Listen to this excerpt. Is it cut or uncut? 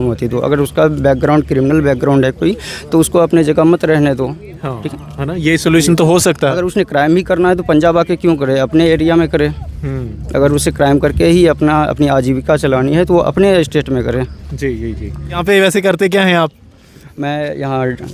uncut